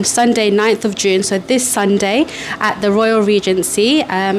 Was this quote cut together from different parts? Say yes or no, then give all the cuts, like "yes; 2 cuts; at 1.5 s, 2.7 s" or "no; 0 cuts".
no; 0 cuts